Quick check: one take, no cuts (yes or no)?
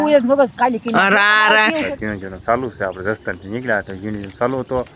no